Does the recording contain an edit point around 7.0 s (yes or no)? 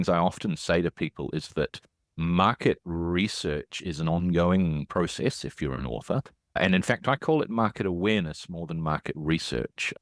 no